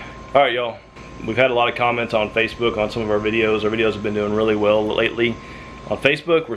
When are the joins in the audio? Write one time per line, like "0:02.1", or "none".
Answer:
0:01.0